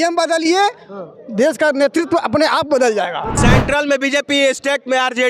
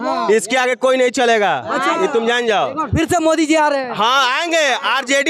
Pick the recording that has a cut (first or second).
first